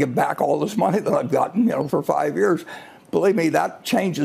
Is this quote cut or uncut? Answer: cut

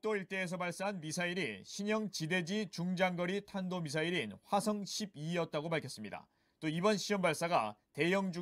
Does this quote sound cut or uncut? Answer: uncut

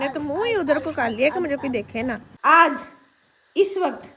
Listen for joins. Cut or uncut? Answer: cut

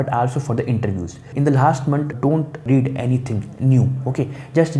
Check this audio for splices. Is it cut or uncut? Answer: cut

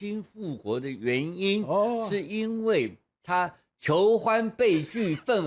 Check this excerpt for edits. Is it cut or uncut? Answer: uncut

